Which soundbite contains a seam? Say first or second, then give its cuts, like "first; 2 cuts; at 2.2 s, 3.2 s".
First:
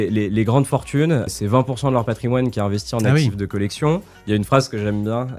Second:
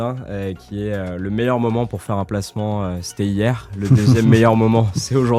first; 2 cuts; at 1.3 s, 4.1 s